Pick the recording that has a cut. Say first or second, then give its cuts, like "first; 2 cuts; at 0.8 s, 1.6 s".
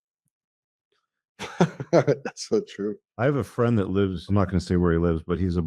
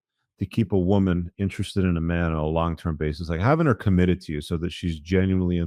first; 2 cuts; at 3.0 s, 4.2 s